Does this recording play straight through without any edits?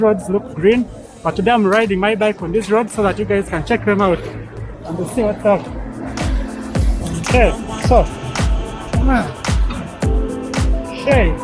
yes; 0 cuts

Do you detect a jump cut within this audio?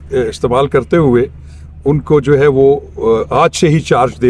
no; 0 cuts

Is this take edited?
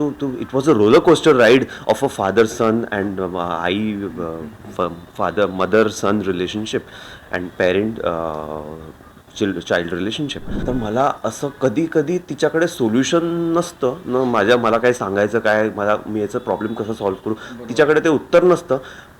yes; 1 cut; at 10.5 s

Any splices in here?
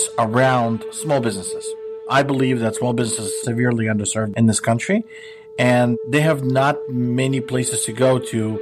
no; 0 cuts

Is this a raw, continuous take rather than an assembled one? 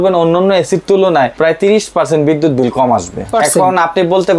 no; 2 cuts; at 1.3 s, 3.3 s

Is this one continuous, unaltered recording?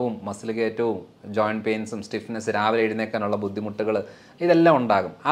yes; 0 cuts

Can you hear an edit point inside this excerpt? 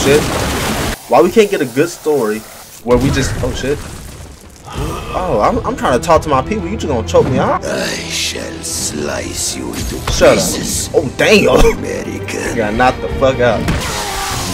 yes; 3 cuts; at 0.9 s, 7.6 s, 13.8 s

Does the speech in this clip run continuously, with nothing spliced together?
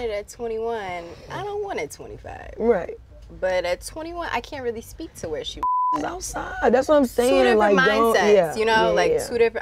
yes; 0 cuts

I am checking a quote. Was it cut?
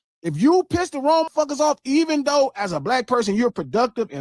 yes; 1 cut; at 1.3 s

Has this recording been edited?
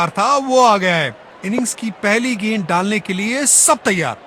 no; 0 cuts

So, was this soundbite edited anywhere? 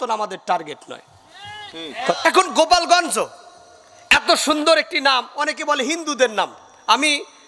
yes; 1 cut; at 2.1 s

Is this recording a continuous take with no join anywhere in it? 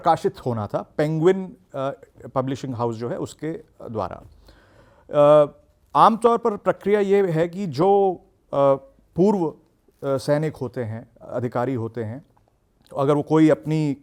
yes; 0 cuts

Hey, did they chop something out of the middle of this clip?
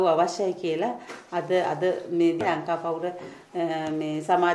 yes; 1 cut; at 2.4 s

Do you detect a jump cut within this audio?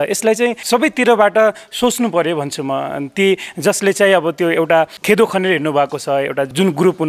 no; 0 cuts

